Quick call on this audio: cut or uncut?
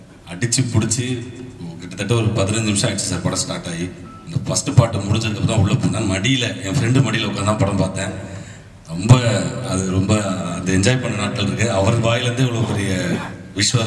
uncut